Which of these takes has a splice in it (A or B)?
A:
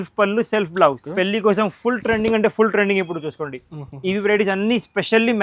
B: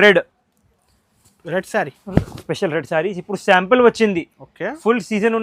A